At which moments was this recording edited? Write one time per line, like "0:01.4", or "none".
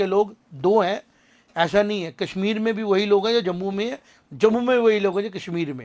none